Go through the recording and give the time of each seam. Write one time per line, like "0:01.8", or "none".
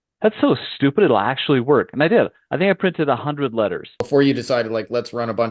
0:04.0